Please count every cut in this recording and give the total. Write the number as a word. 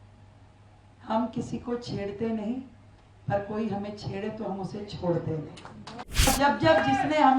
one